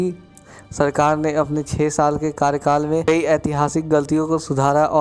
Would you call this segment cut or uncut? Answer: cut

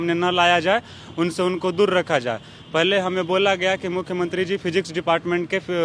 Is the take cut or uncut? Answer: uncut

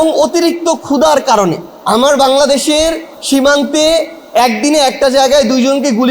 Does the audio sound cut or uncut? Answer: cut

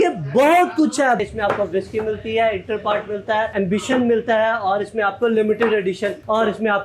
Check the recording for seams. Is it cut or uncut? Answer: cut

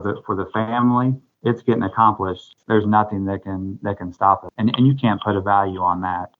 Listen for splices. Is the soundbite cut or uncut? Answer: cut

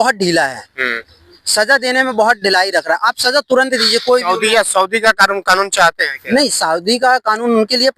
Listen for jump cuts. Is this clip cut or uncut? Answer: uncut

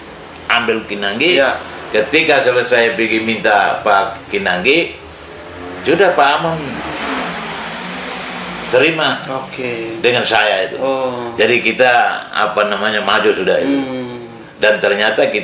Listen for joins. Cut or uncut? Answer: uncut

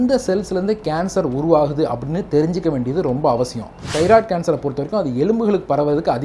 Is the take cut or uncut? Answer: cut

